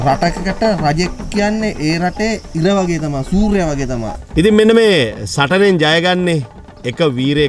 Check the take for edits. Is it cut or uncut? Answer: cut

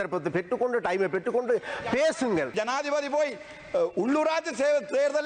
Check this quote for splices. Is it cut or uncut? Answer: cut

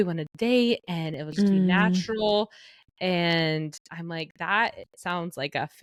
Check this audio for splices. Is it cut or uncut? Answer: uncut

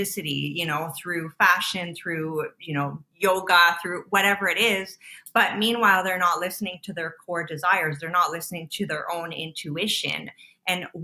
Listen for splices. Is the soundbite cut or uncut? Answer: uncut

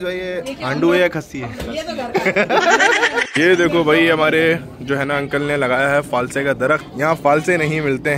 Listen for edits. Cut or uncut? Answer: cut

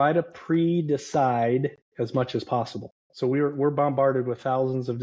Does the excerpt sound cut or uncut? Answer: uncut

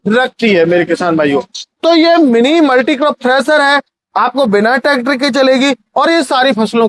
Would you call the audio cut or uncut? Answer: uncut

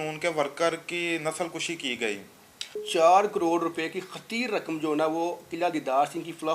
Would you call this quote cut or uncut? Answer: cut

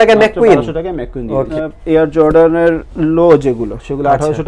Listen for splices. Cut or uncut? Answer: uncut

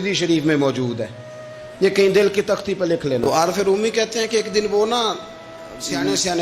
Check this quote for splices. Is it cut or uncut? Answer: cut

